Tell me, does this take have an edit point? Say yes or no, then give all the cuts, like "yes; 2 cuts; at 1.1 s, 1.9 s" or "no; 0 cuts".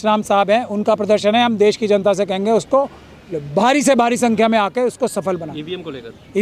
no; 0 cuts